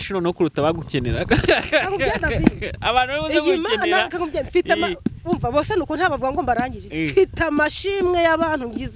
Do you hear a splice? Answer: no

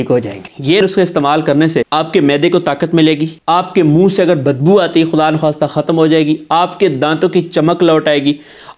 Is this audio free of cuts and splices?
no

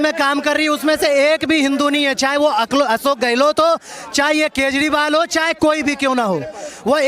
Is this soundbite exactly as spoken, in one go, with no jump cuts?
yes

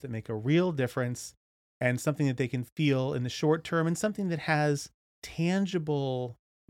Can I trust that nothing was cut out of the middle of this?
no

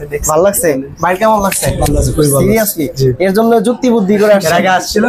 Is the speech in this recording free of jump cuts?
yes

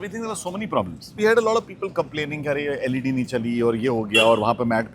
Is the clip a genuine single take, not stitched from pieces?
no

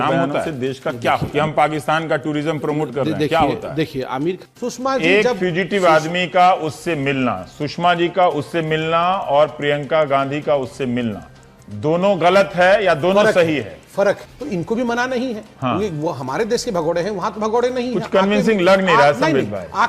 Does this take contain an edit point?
yes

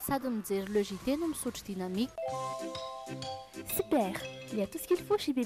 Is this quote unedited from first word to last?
no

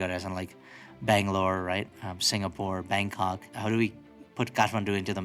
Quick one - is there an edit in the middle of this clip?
yes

